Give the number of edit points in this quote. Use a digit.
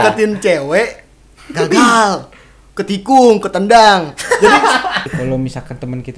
1